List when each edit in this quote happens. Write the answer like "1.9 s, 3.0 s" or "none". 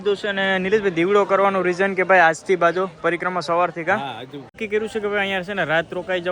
4.4 s